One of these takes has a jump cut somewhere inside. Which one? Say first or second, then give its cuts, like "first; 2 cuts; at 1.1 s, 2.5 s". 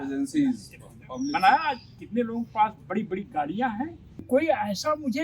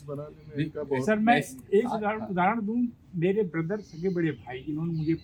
first; 1 cut; at 4.3 s